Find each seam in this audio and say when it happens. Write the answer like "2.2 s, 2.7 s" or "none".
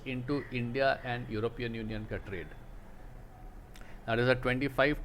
none